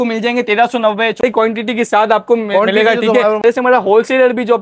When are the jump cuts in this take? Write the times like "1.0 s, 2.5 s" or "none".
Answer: 1.2 s, 3.4 s

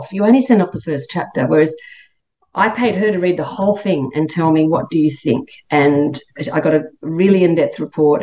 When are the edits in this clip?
none

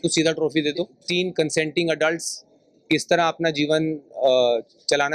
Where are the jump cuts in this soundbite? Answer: 1.0 s

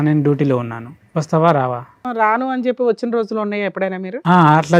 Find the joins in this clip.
2.0 s

